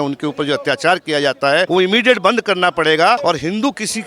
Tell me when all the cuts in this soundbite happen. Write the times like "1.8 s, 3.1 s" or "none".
1.7 s, 3.2 s

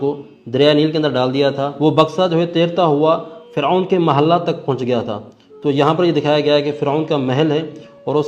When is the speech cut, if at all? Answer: 1.7 s

